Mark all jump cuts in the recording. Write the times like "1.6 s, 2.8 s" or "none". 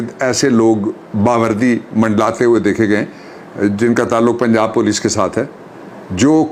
none